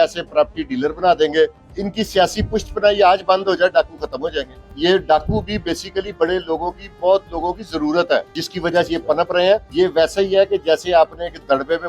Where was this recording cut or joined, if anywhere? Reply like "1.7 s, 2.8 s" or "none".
1.7 s, 4.6 s, 8.4 s, 9.7 s